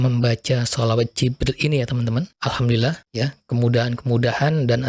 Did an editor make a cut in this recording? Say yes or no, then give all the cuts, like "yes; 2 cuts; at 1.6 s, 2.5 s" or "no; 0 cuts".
yes; 2 cuts; at 2.3 s, 3.0 s